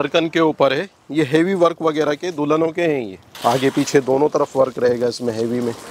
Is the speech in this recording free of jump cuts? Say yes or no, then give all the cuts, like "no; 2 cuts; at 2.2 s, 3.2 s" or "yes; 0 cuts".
no; 1 cut; at 3.2 s